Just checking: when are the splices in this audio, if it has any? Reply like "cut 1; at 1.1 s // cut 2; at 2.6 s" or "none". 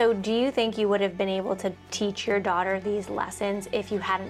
none